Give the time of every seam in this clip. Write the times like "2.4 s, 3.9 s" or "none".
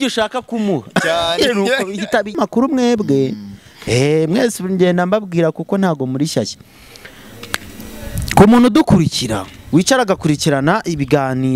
2.4 s